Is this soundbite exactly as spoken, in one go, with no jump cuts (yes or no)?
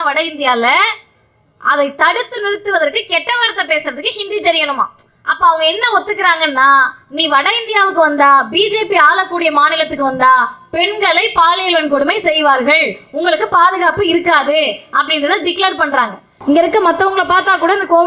no